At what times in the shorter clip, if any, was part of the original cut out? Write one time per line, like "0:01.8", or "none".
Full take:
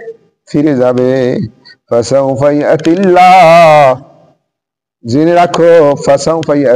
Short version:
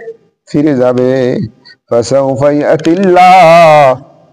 none